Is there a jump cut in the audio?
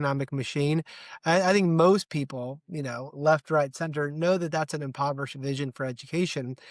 no; 0 cuts

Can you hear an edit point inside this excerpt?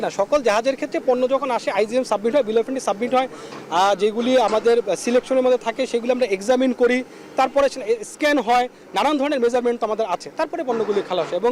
no; 0 cuts

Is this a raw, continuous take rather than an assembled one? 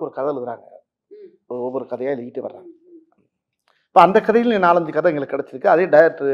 yes; 0 cuts

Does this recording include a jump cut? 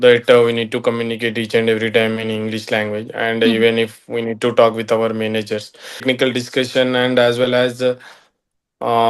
yes; 1 cut; at 6.0 s

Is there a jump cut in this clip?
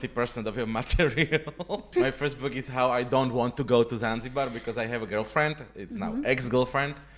yes; 1 cut; at 1.8 s

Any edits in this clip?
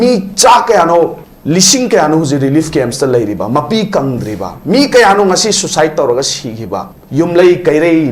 yes; 2 cuts; at 1.3 s, 7.0 s

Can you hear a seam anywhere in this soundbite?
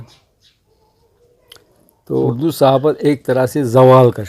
yes; 1 cut; at 2.3 s

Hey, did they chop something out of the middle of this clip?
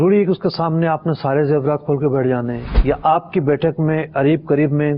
yes; 1 cut; at 2.7 s

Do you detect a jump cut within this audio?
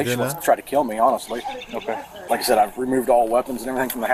no; 0 cuts

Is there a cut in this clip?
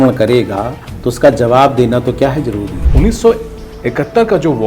yes; 1 cut; at 2.8 s

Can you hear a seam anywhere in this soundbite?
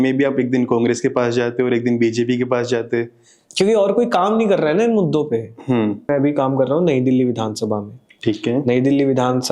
yes; 1 cut; at 6.1 s

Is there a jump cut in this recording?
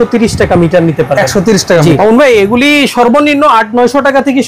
yes; 1 cut; at 2.0 s

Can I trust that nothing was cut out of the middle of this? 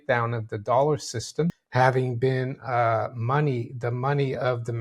no; 1 cut; at 1.6 s

